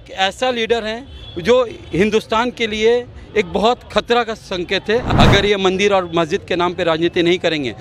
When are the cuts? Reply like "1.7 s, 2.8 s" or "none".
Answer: 5.1 s